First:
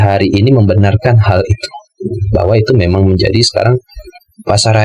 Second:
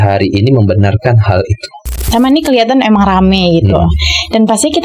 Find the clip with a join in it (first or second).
second